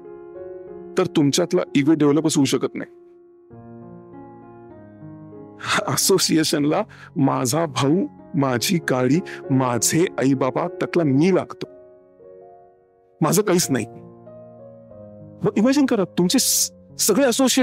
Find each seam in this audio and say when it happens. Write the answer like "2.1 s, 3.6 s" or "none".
none